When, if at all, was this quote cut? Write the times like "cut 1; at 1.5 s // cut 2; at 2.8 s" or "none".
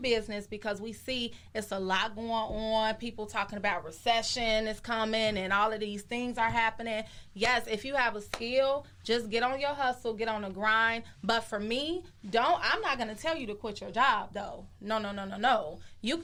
none